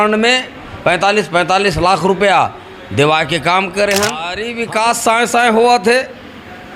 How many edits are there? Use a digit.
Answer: 1